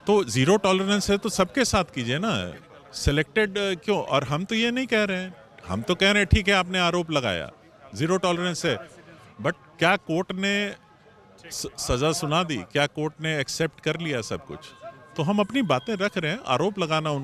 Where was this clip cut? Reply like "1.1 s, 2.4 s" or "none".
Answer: none